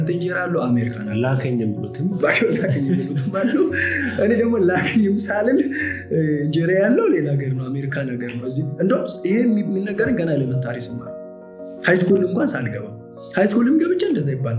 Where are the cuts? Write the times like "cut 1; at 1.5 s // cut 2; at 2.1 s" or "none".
none